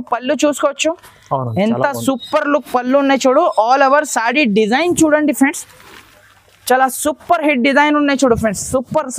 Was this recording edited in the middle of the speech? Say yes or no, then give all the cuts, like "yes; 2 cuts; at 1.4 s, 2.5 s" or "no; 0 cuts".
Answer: no; 0 cuts